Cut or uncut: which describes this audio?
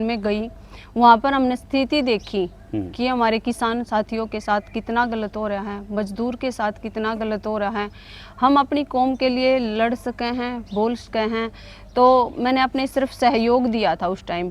uncut